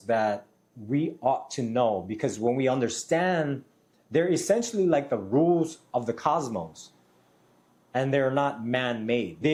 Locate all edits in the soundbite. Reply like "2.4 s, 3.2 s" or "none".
none